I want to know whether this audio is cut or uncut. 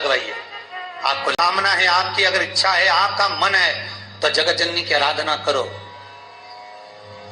cut